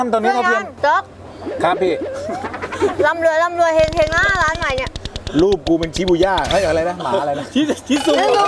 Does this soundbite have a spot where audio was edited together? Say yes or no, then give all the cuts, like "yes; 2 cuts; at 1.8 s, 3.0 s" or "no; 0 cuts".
no; 0 cuts